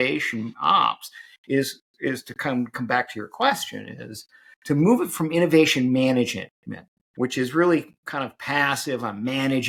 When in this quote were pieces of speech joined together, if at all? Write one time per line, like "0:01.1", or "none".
none